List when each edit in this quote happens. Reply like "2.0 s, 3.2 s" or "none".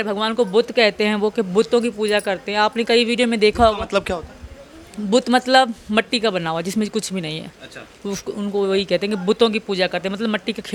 none

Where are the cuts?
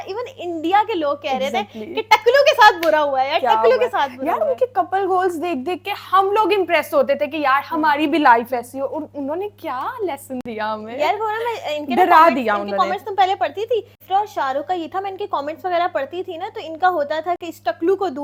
none

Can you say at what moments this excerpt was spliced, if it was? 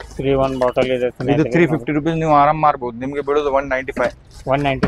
none

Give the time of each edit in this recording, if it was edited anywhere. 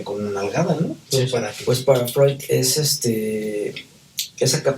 1.5 s

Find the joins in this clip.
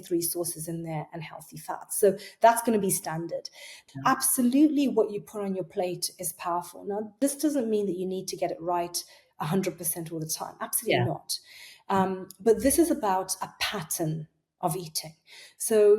3.8 s, 7.2 s

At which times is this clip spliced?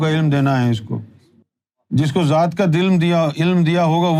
none

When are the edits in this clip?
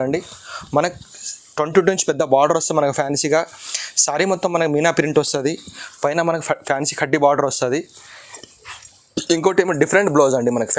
none

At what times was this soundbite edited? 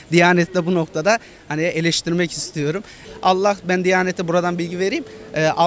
3.0 s

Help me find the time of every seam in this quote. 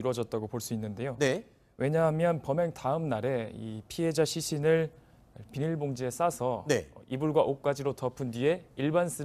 none

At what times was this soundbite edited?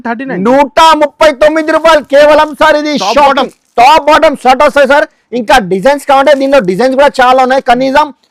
none

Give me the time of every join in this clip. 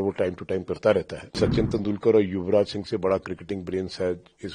1.3 s

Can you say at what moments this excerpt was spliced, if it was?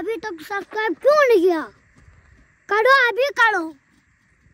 none

